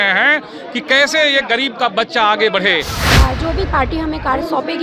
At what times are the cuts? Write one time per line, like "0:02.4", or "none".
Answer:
0:03.0